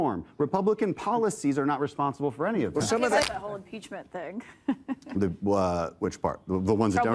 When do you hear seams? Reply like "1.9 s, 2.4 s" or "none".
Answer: 3.2 s